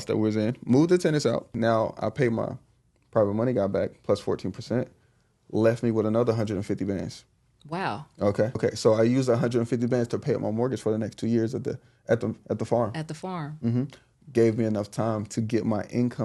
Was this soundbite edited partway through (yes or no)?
yes